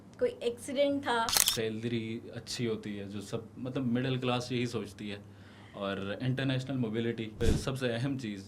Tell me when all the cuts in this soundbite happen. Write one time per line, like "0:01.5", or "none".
0:01.4
0:07.3